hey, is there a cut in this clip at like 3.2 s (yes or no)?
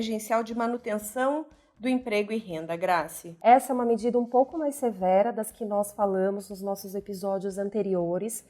yes